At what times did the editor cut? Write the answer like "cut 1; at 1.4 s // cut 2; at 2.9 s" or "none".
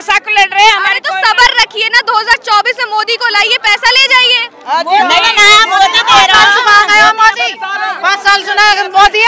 none

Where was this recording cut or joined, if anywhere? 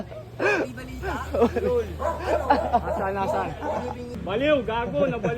cut 1; at 4.2 s

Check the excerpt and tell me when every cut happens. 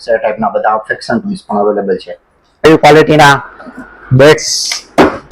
cut 1; at 2.6 s

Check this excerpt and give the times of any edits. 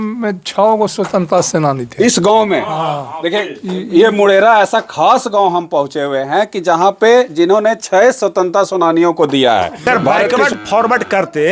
cut 1; at 10.4 s

